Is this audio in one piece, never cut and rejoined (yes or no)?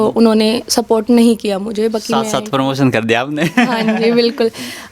no